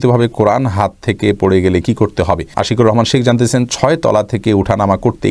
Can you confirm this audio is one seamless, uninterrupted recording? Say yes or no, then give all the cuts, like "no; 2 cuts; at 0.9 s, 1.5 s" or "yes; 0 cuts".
no; 1 cut; at 2.5 s